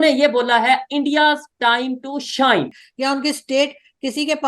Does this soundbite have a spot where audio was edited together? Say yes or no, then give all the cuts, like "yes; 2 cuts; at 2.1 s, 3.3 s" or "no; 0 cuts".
yes; 1 cut; at 2.8 s